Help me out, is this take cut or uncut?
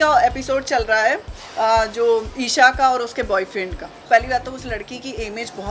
cut